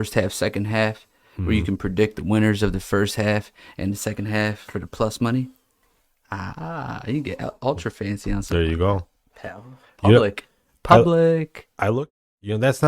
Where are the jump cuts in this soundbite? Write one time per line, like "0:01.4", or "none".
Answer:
0:11.9